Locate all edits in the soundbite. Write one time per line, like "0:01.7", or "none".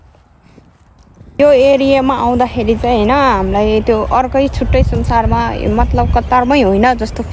0:01.4